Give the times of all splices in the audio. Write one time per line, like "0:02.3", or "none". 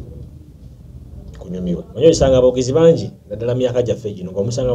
0:01.9